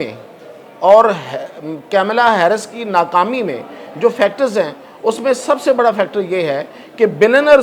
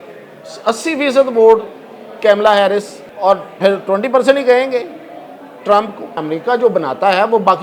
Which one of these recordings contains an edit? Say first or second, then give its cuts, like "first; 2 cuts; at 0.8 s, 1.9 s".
second; 2 cuts; at 3.0 s, 6.2 s